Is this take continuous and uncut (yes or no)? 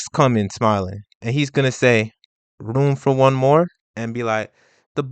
no